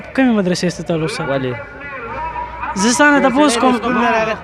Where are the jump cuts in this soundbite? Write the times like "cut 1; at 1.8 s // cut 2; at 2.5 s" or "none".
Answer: cut 1; at 2.0 s

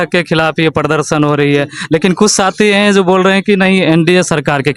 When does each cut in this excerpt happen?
none

